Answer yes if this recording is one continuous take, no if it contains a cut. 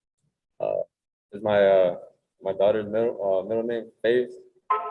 yes